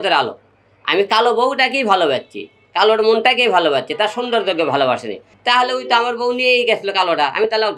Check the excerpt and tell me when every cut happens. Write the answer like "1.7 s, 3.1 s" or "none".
5.3 s

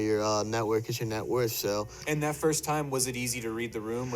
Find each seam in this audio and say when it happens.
2.0 s

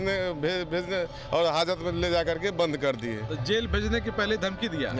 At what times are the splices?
none

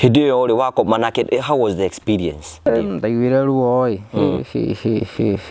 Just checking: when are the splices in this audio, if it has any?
2.7 s

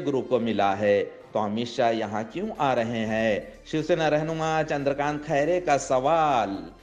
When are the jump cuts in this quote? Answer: none

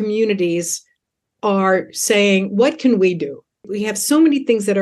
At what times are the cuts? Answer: 3.7 s

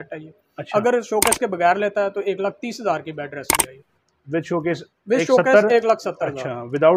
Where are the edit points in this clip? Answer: none

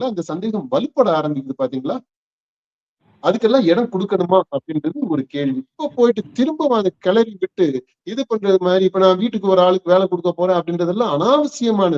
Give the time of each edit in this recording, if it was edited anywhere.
5.8 s

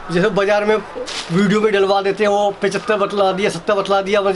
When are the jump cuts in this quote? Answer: none

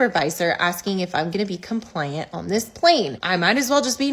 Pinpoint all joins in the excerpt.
3.2 s

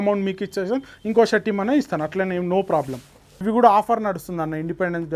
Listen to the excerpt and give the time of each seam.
3.4 s

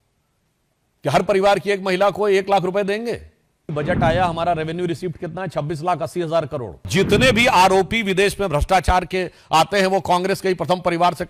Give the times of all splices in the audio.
3.7 s, 6.9 s

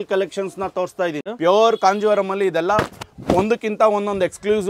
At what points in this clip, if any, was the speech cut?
1.2 s

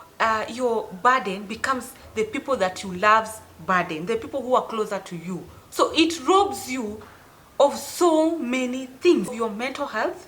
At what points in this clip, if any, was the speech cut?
5.5 s, 9.3 s

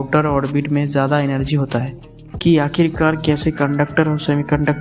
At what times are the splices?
2.2 s

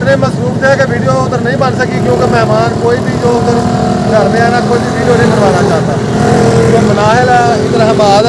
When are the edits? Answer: none

